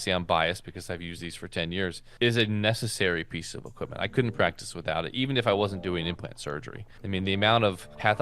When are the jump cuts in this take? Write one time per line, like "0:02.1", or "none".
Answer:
0:02.0

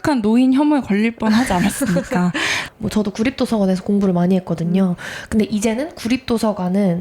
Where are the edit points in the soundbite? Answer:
0:02.6

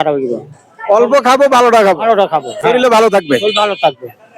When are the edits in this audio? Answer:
none

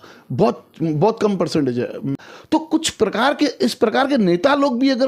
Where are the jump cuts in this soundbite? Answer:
0:02.1

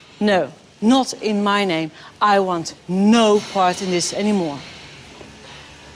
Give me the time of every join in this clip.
none

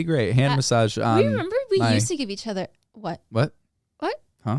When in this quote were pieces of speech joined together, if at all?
0:02.8

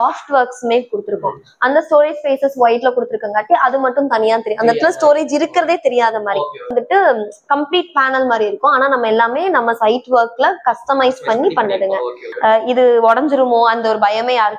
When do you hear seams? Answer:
0:06.7
0:12.2

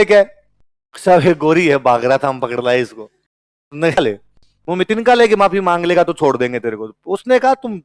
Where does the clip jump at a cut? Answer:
0:04.0

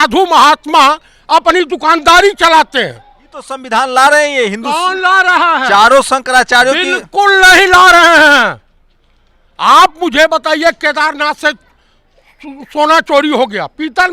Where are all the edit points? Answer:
0:03.6

